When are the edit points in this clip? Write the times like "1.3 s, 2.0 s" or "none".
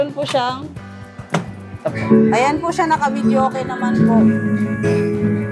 2.0 s